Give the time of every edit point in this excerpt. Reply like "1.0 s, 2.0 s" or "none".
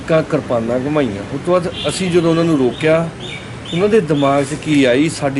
none